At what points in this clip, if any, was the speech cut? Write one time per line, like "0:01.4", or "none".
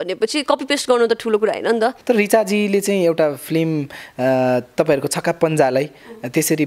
0:02.0